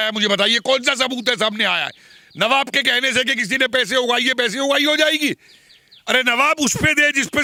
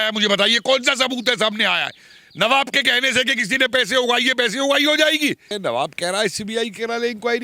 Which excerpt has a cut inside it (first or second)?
second